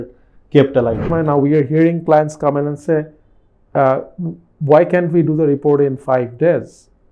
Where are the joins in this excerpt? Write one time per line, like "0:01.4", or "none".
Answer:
0:01.0